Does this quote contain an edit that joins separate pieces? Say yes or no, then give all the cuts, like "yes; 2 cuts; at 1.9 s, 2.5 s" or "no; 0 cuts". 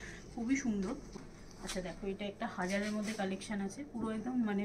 yes; 1 cut; at 1.1 s